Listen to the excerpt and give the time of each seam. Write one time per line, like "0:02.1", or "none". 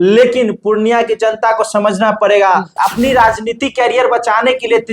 0:02.8